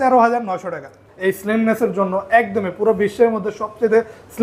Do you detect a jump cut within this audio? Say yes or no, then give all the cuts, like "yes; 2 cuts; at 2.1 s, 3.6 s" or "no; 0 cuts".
yes; 1 cut; at 1.0 s